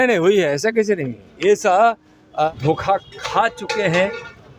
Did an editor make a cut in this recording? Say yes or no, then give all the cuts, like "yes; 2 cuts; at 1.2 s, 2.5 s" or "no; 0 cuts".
yes; 1 cut; at 2.5 s